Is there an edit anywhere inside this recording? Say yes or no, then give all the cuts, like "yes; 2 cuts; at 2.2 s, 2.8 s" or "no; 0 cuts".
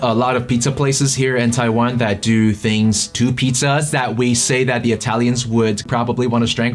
no; 0 cuts